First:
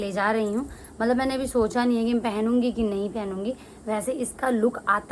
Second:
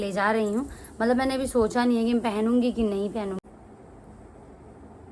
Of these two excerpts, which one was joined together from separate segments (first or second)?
second